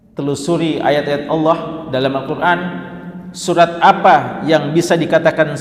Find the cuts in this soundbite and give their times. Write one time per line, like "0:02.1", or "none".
none